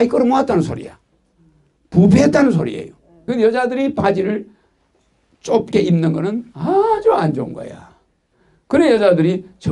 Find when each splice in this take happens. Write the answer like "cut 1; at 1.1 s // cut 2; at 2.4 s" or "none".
cut 1; at 3.3 s